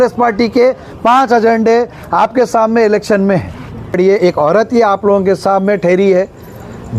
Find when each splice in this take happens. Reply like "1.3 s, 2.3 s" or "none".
4.0 s

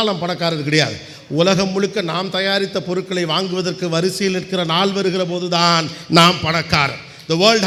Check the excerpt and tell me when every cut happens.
none

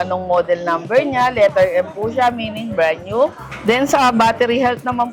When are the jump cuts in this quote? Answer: 3.5 s

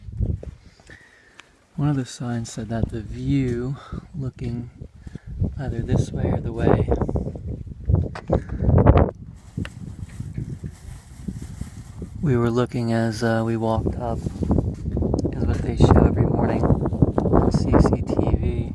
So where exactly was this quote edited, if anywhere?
none

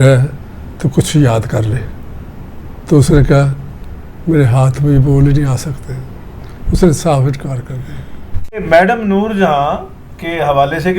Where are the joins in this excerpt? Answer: 8.6 s

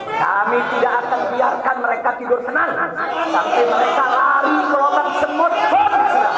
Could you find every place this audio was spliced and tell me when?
none

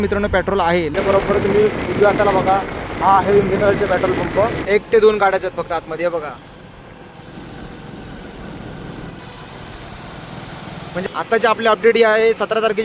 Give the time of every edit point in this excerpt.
0.9 s, 4.6 s, 10.9 s

